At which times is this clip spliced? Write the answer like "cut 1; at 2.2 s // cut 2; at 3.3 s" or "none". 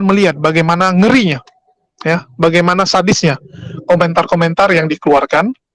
none